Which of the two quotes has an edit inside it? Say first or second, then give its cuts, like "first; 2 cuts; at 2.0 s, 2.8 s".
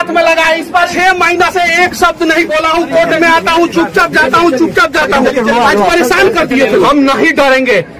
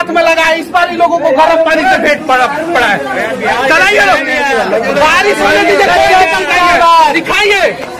first; 2 cuts; at 0.9 s, 6.8 s